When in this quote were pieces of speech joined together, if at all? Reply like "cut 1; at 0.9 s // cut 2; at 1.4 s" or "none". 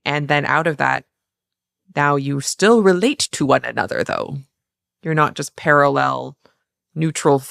none